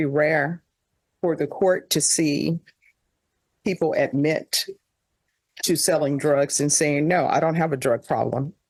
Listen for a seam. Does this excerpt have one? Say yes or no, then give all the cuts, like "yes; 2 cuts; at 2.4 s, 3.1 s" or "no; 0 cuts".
no; 0 cuts